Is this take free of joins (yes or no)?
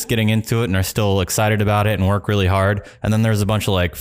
yes